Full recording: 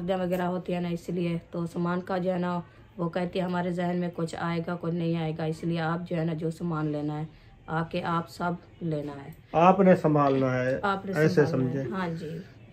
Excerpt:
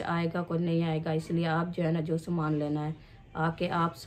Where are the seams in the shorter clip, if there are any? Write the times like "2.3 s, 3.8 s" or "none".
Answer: none